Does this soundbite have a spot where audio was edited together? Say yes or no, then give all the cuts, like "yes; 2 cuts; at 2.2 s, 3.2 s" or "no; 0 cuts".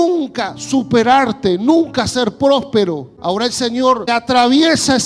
yes; 2 cuts; at 3.1 s, 4.1 s